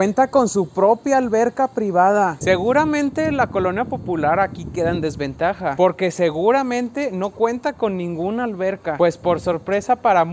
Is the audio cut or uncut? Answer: cut